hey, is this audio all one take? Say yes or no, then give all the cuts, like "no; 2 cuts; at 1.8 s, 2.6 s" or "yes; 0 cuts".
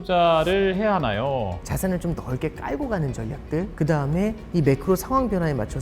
no; 1 cut; at 1.6 s